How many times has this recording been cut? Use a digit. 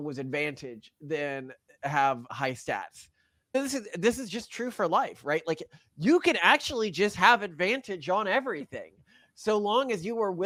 0